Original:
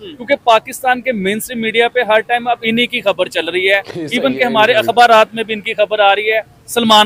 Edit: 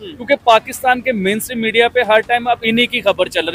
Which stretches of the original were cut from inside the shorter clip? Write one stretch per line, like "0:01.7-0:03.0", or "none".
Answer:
none